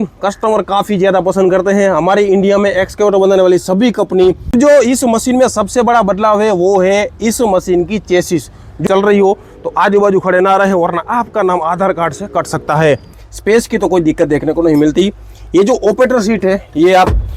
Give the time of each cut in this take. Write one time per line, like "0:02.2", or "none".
0:04.5
0:08.8
0:13.0